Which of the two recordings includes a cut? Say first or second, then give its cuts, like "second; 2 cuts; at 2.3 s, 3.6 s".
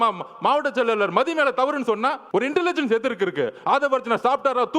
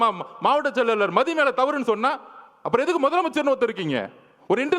first; 1 cut; at 2.2 s